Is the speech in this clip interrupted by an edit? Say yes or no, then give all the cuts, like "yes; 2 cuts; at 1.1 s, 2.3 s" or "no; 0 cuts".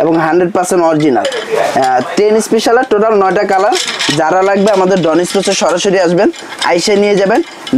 no; 0 cuts